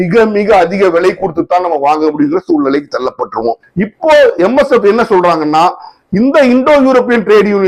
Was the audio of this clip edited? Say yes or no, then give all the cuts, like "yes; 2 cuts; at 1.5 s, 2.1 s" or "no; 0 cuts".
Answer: yes; 1 cut; at 3.6 s